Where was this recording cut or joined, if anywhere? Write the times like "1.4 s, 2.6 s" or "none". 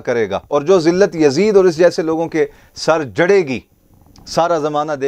none